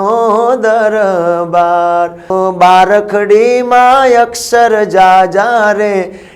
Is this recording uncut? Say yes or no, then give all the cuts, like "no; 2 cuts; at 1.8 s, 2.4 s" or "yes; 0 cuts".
no; 1 cut; at 2.3 s